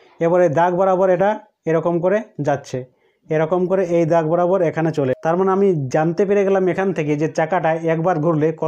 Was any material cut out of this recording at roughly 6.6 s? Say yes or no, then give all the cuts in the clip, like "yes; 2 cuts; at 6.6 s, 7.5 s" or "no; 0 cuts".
no; 1 cut; at 5.2 s